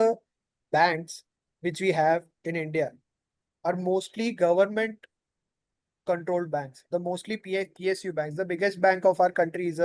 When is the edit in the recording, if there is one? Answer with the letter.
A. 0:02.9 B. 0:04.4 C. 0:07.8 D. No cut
D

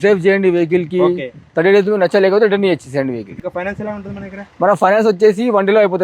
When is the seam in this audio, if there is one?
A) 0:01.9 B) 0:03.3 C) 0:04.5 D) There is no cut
B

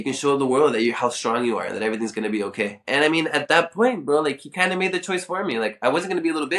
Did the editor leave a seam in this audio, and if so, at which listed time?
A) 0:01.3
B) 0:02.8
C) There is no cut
B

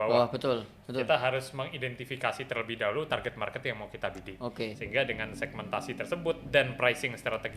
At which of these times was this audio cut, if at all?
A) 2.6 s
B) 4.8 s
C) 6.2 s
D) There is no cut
B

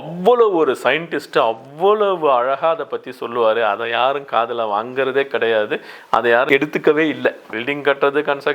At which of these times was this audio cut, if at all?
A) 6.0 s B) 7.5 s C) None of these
B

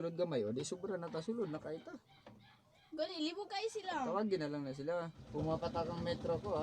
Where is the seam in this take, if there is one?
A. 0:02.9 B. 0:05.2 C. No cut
B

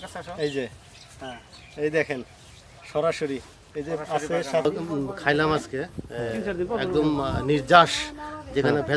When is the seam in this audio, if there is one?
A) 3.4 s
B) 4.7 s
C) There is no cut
B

